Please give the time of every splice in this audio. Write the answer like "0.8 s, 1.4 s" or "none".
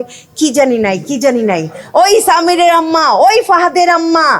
1.8 s